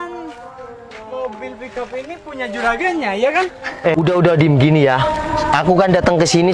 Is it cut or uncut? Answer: cut